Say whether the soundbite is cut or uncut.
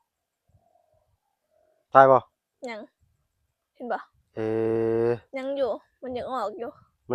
uncut